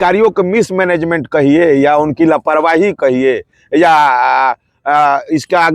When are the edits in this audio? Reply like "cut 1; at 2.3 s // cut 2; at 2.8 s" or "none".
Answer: none